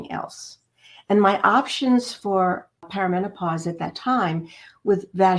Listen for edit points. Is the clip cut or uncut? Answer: cut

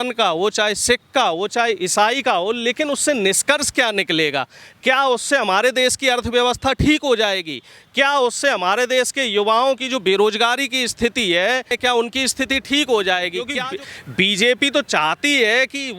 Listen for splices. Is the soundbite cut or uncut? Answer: cut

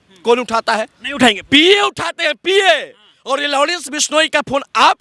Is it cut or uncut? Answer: uncut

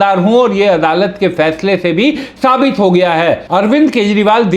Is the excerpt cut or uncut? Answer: cut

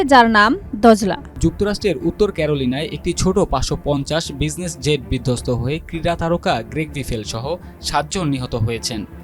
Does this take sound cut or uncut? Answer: cut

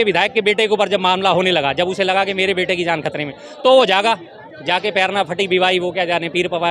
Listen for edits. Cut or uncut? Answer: uncut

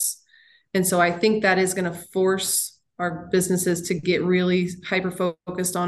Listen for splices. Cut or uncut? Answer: uncut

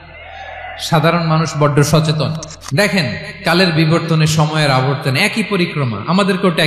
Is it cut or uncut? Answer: cut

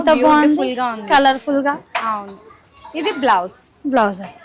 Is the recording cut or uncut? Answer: uncut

